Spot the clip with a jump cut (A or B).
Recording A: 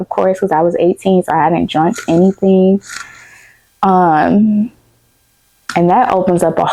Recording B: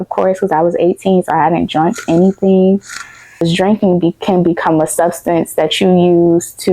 B